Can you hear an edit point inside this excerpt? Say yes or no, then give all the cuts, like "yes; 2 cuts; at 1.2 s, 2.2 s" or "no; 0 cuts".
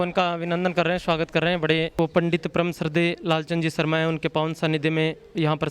yes; 1 cut; at 1.9 s